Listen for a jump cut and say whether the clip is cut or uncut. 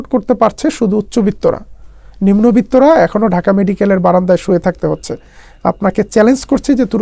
uncut